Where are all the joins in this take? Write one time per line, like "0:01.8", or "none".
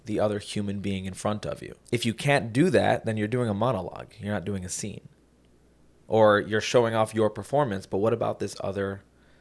0:01.7